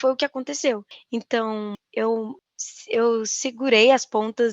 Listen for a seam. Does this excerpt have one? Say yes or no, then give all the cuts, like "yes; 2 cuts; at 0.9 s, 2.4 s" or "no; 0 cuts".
no; 0 cuts